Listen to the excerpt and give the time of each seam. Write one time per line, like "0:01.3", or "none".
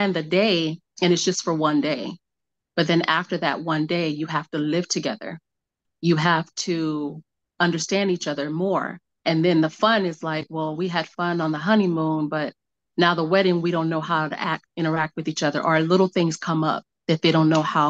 0:16.9

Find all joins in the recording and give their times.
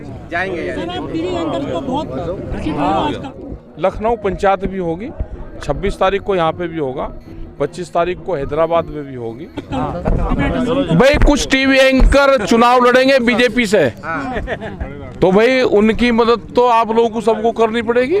0:03.2
0:09.7

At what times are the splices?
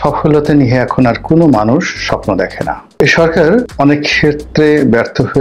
0:03.0
0:03.7

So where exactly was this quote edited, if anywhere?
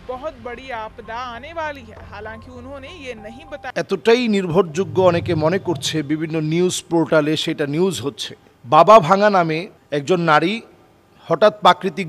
0:03.7

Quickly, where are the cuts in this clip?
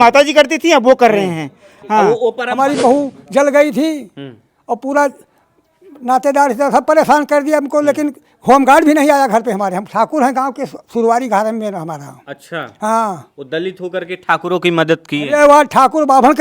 0:02.4

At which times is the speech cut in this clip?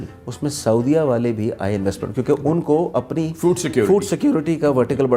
none

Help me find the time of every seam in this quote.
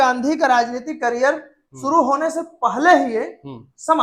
none

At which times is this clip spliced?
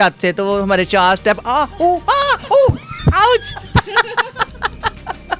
none

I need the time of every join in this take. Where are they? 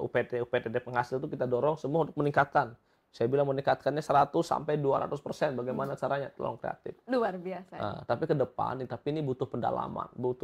none

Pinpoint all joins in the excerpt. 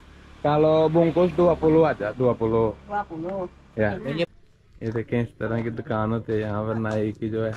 0:04.3

